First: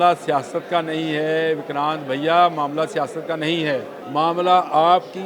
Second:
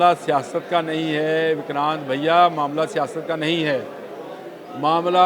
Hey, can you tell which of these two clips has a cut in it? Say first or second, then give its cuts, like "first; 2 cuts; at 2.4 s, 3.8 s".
first; 1 cut; at 4.0 s